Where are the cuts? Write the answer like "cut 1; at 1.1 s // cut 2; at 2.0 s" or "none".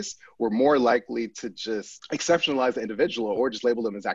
cut 1; at 1.9 s

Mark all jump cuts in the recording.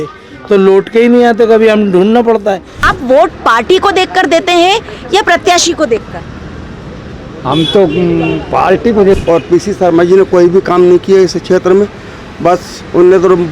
cut 1; at 2.8 s // cut 2; at 9.2 s

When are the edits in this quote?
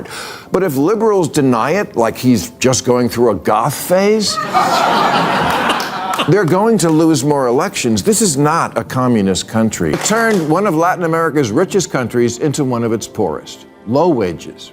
cut 1; at 9.8 s

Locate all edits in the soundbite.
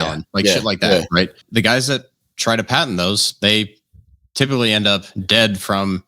cut 1; at 1.4 s

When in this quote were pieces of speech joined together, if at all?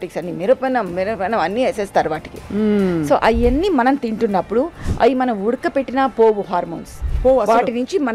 none

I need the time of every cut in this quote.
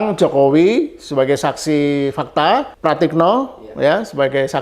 cut 1; at 2.7 s

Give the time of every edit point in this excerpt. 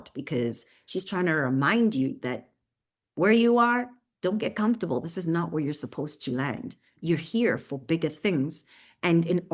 cut 1; at 6.9 s

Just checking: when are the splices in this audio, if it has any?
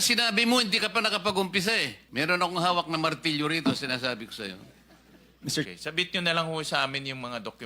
cut 1; at 2.0 s // cut 2; at 5.7 s

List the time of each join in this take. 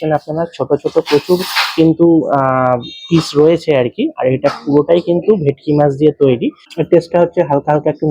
cut 1; at 6.6 s

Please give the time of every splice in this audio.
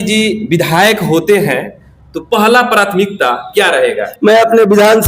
cut 1; at 4.1 s

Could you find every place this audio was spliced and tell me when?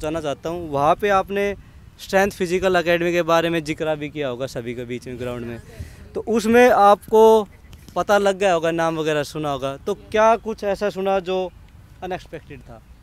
none

